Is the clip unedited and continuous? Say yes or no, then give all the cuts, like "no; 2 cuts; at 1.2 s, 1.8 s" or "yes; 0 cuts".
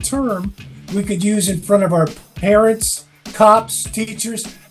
yes; 0 cuts